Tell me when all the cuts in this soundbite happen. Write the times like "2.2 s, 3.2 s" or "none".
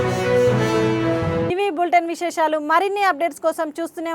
none